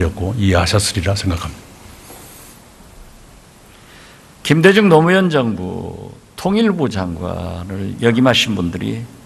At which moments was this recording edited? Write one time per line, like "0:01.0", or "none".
none